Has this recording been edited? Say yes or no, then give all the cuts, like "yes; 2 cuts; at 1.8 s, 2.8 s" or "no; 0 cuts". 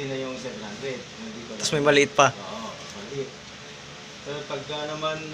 no; 0 cuts